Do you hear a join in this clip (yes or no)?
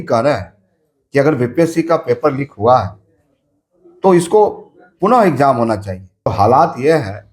yes